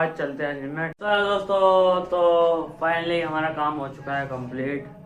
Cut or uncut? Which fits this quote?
cut